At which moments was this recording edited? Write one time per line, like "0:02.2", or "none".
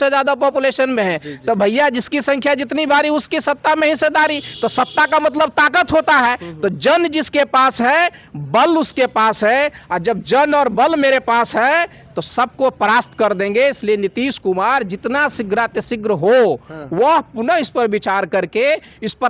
none